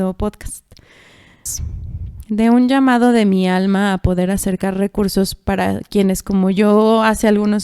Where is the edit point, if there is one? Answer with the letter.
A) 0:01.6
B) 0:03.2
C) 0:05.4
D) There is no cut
A